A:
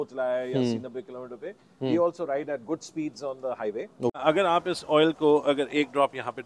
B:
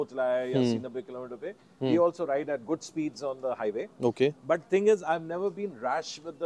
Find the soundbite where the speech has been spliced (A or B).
A